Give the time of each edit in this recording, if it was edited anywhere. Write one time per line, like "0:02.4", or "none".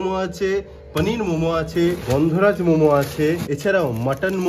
0:02.0
0:03.5

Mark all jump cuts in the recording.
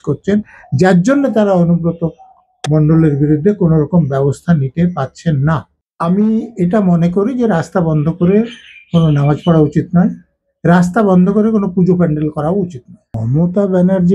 0:05.8
0:13.2

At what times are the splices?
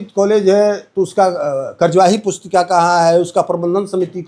none

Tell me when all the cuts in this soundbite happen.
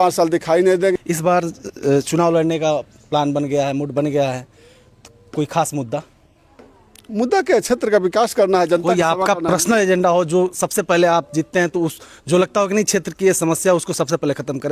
0:00.9

